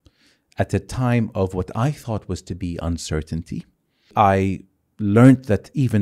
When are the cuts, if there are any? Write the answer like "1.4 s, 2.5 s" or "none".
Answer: 4.1 s